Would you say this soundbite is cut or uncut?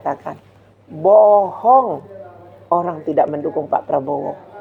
uncut